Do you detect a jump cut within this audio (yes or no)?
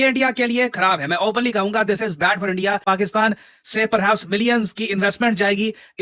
yes